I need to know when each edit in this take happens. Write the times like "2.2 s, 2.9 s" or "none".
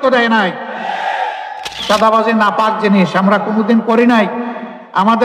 1.7 s

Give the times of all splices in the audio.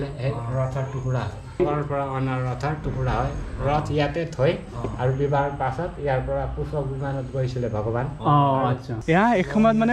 1.6 s, 8.9 s

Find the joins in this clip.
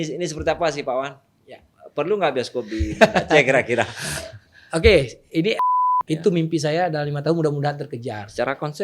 5.6 s

